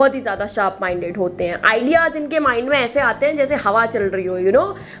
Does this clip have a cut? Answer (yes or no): no